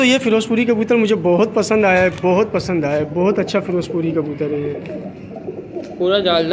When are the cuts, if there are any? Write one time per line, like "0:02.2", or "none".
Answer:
none